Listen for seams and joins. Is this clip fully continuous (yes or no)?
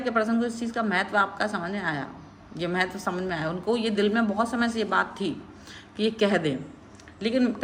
yes